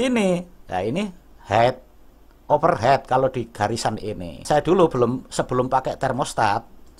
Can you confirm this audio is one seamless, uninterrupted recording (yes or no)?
no